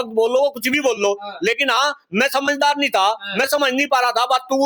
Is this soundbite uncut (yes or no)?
yes